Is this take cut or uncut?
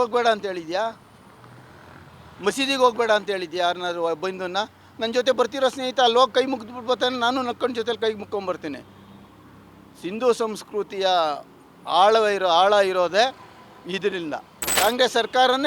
cut